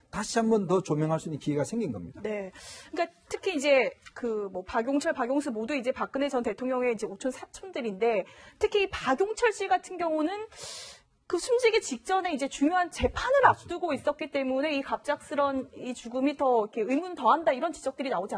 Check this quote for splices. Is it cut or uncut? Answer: cut